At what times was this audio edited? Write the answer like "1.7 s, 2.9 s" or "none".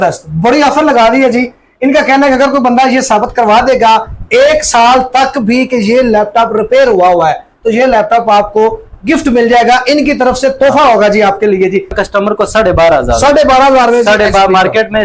12.0 s